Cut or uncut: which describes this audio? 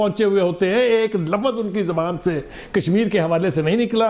uncut